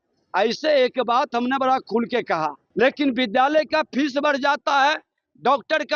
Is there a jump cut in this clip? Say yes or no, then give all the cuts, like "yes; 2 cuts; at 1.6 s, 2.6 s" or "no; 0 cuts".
yes; 1 cut; at 2.6 s